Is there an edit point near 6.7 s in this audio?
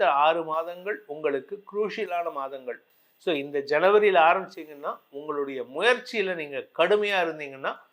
no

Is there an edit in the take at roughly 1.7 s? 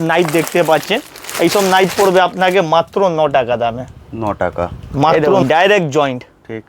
no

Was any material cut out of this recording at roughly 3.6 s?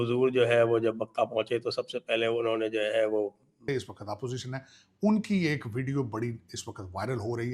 yes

